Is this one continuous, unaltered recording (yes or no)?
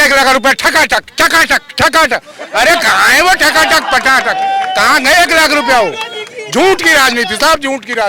yes